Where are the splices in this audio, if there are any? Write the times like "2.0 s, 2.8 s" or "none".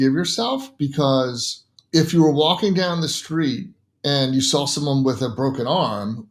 none